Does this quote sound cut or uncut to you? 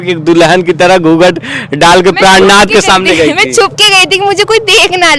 uncut